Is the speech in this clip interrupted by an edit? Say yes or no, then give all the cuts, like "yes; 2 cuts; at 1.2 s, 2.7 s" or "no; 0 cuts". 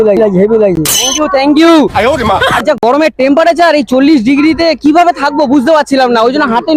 no; 0 cuts